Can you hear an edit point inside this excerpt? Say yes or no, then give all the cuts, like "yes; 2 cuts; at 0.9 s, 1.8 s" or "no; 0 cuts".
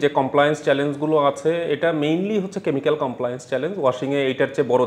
no; 0 cuts